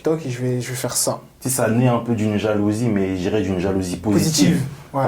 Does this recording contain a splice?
yes; 1 cut; at 1.3 s

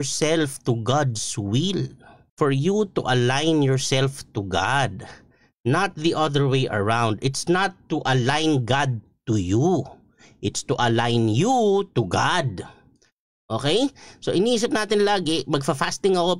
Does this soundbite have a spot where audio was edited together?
no; 0 cuts

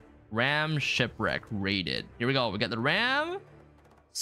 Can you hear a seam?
no; 0 cuts

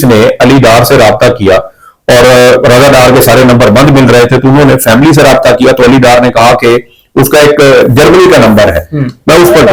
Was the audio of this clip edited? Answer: no; 0 cuts

